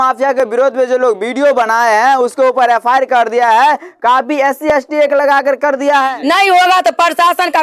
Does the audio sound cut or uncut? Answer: cut